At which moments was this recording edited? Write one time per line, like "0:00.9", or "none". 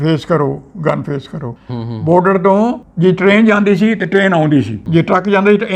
0:01.5